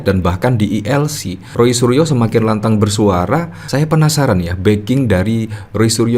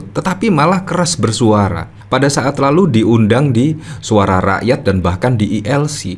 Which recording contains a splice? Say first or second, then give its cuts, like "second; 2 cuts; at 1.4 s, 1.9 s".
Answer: first; 1 cut; at 3.5 s